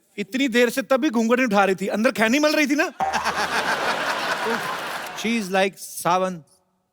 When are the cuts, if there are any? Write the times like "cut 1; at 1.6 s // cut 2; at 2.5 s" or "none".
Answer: cut 1; at 5.0 s

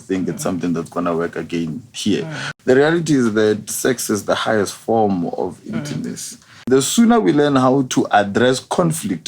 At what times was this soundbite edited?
cut 1; at 2.4 s // cut 2; at 6.7 s

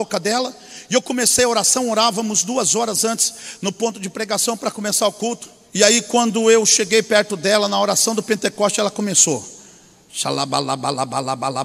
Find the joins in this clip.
cut 1; at 5.6 s

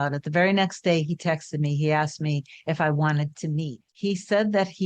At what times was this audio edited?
cut 1; at 3.8 s

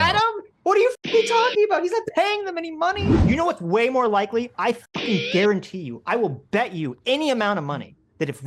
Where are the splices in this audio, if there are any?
cut 1; at 3.2 s

